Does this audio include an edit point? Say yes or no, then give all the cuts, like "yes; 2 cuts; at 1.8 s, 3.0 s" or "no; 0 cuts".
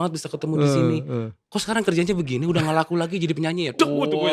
no; 0 cuts